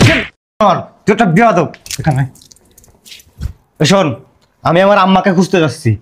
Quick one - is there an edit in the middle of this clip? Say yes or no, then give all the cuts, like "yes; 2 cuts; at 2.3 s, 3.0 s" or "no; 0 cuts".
no; 0 cuts